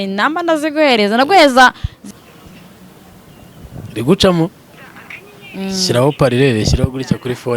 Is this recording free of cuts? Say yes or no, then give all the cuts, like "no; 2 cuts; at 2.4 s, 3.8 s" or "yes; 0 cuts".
no; 1 cut; at 1.9 s